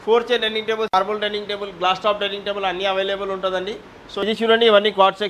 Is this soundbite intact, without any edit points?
no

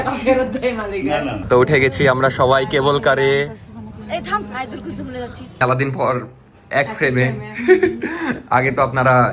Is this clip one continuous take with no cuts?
no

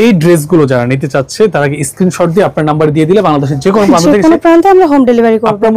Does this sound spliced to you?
no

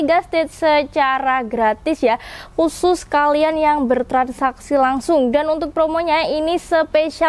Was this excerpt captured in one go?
yes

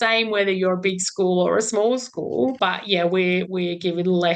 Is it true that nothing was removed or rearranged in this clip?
no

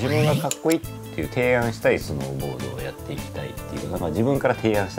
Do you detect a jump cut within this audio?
no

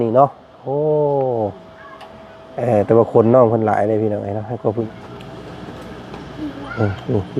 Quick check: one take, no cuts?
no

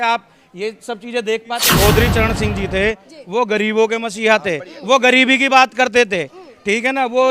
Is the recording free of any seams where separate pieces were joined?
no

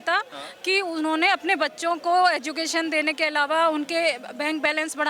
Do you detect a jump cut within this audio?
no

